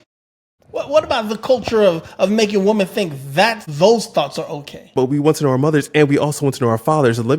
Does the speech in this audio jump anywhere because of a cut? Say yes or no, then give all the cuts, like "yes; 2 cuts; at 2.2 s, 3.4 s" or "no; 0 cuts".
yes; 1 cut; at 4.9 s